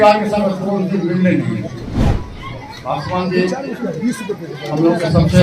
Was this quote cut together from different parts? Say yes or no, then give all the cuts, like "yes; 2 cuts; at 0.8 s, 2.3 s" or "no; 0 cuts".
yes; 1 cut; at 2.0 s